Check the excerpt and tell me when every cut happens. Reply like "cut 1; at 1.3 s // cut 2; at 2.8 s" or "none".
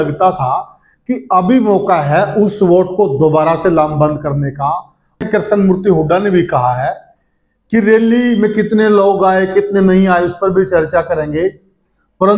cut 1; at 5.2 s

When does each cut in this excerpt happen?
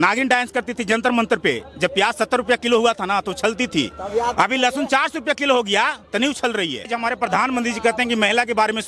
cut 1; at 6.9 s

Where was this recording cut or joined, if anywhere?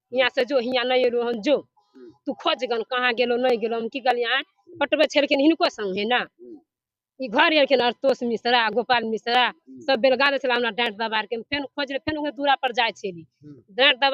none

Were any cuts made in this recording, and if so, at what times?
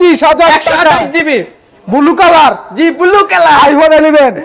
none

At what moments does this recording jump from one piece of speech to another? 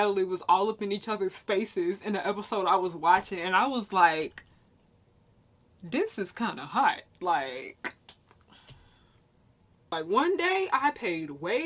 none

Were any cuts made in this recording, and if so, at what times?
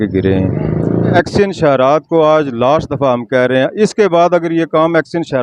cut 1; at 1.1 s

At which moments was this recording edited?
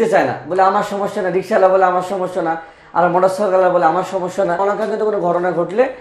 cut 1; at 4.6 s

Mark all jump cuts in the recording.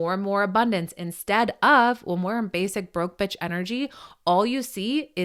none

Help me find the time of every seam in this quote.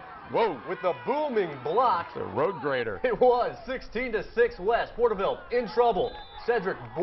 cut 1; at 2.8 s

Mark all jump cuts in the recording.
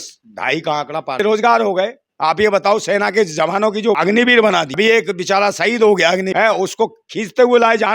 cut 1; at 1.2 s // cut 2; at 4.0 s // cut 3; at 4.7 s // cut 4; at 6.3 s

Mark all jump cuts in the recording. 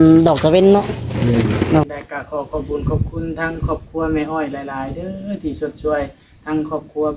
cut 1; at 1.8 s

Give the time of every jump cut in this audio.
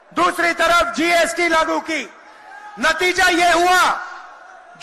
none

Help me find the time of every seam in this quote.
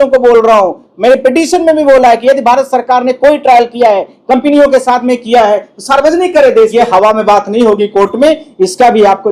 cut 1; at 6.7 s

